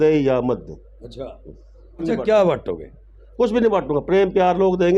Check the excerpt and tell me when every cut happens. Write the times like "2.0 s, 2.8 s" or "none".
2.0 s